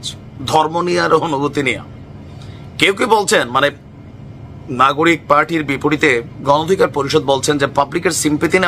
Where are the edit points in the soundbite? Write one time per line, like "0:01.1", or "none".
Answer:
none